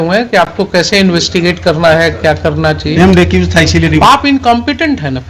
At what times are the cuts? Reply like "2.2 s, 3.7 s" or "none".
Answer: none